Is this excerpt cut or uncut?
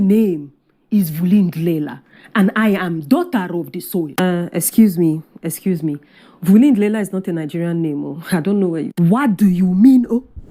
cut